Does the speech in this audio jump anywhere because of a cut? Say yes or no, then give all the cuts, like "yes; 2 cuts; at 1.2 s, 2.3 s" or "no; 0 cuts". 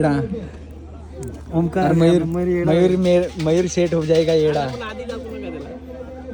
no; 0 cuts